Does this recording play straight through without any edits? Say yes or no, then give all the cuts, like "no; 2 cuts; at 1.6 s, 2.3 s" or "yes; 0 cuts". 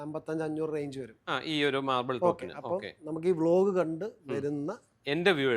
yes; 0 cuts